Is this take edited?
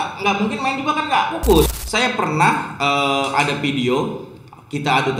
yes; 1 cut; at 1.8 s

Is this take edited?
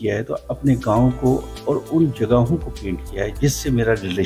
no; 0 cuts

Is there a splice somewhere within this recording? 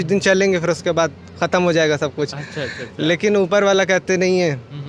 no; 0 cuts

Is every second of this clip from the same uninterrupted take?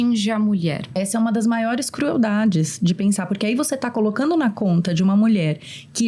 no; 1 cut; at 1.0 s

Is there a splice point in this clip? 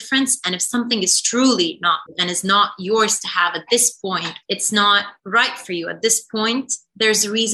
yes; 2 cuts; at 2.1 s, 4.3 s

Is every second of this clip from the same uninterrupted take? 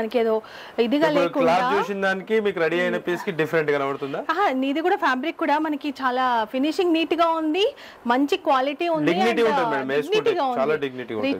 yes; 0 cuts

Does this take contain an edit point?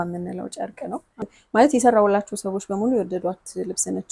yes; 1 cut; at 1.4 s

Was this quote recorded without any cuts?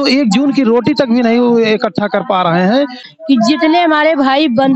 no; 1 cut; at 3.0 s

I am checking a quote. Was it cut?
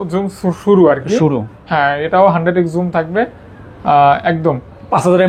no; 0 cuts

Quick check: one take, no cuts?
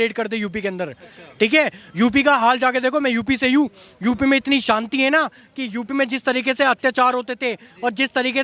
yes; 0 cuts

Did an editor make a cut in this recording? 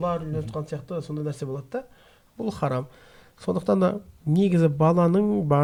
no; 0 cuts

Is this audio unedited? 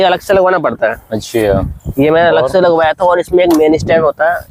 yes; 0 cuts

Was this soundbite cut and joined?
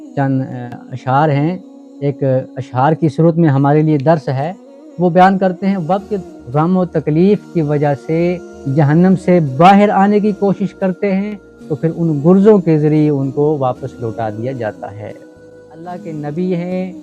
yes; 2 cuts; at 6.2 s, 15.5 s

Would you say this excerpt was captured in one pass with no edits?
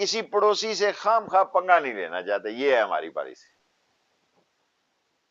yes; 0 cuts

